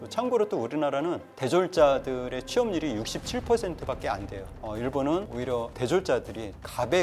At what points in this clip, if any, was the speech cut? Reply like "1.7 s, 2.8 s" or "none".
4.6 s